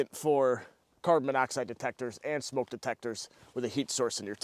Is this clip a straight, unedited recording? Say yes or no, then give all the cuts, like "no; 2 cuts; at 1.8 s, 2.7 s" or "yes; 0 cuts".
yes; 0 cuts